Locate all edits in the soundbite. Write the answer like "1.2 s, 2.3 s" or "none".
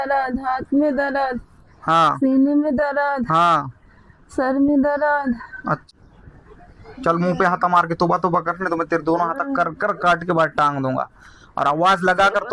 5.9 s